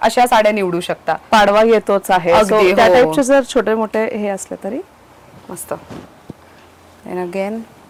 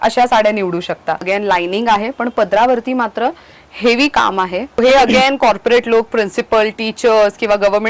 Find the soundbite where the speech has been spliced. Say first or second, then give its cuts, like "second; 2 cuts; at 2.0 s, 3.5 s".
second; 2 cuts; at 1.2 s, 4.8 s